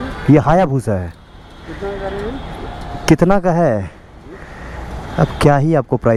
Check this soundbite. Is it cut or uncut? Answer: uncut